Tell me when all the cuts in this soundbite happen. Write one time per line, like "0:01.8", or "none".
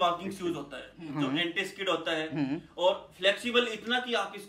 0:01.1